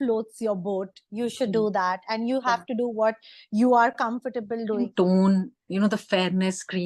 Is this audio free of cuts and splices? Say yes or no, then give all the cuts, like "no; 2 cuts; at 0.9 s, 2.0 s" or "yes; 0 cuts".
no; 1 cut; at 4.8 s